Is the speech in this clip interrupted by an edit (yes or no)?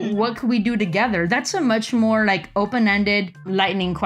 no